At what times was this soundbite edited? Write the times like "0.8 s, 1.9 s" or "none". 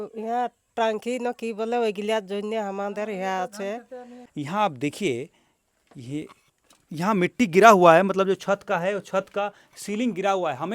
4.2 s